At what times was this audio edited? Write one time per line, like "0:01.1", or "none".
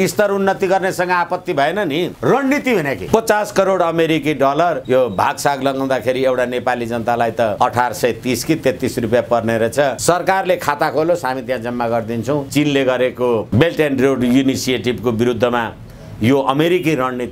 0:02.1
0:03.0
0:04.8
0:07.5
0:10.0
0:12.5
0:13.5